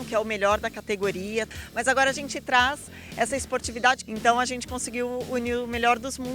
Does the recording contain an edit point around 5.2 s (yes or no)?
no